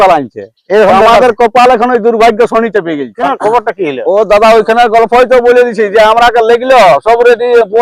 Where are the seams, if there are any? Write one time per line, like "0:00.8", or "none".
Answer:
0:03.2